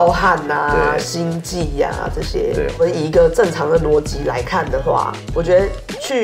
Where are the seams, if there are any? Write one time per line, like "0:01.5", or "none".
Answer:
0:02.7
0:05.2